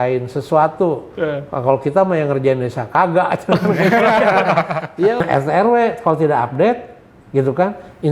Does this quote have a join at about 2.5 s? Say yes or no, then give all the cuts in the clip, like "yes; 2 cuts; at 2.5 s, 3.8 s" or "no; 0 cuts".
no; 1 cut; at 5.2 s